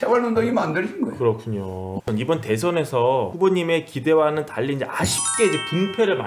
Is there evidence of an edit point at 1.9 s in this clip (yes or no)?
yes